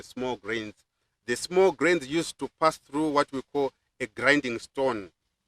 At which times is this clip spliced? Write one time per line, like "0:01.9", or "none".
none